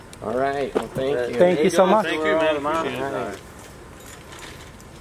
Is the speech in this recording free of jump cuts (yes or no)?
yes